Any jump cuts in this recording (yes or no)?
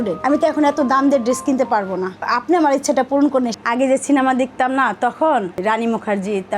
yes